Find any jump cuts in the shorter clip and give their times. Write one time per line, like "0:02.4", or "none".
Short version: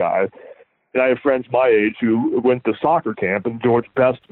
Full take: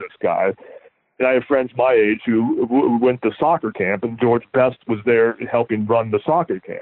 0:02.4

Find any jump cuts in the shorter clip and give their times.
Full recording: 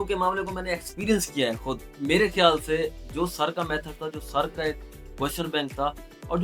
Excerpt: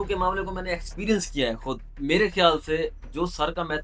none

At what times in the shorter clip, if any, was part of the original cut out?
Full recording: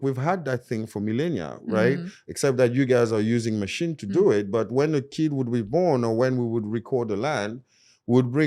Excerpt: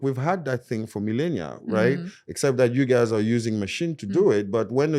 none

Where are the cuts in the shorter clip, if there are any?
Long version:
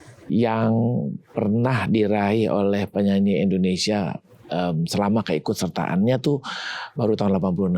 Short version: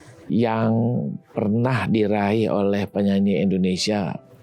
none

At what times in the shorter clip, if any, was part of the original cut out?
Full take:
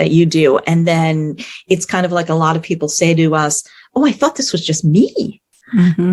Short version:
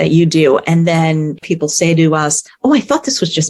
0:01.4
0:02.4

